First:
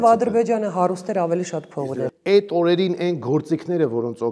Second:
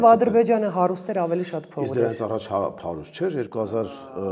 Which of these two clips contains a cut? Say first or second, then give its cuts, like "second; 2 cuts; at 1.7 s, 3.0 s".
first; 1 cut; at 1.9 s